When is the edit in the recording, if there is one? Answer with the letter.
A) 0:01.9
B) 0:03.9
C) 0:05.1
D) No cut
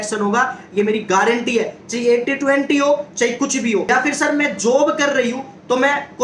B